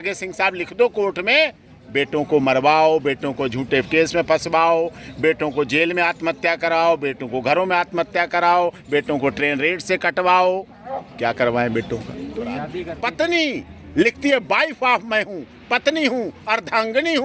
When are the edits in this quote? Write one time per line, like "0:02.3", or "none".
0:12.7